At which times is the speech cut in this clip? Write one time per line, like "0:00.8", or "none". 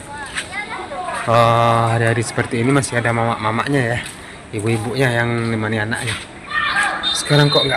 none